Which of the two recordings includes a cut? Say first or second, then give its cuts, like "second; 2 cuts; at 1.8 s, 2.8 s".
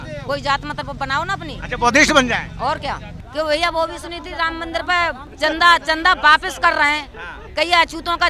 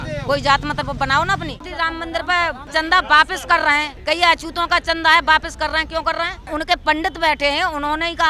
second; 4 cuts; at 1.6 s, 2.7 s, 3.9 s, 6.4 s